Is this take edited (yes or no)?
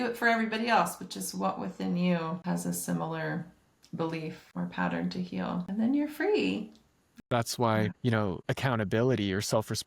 yes